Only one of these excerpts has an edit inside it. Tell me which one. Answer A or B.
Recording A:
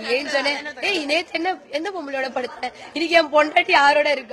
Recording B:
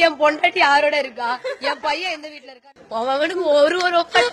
B